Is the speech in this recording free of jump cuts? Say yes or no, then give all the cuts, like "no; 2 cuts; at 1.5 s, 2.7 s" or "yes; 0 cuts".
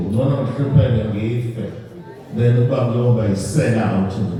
yes; 0 cuts